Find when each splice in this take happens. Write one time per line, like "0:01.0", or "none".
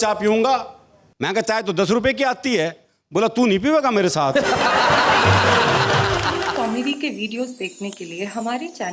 0:06.5

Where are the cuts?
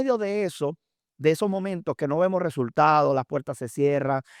none

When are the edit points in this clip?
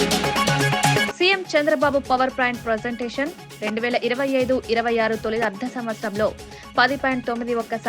0:01.0

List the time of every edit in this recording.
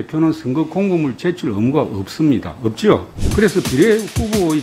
0:03.2

